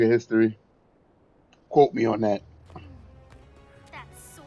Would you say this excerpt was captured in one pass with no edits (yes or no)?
no